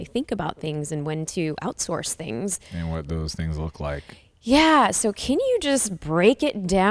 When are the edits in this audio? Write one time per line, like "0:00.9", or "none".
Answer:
none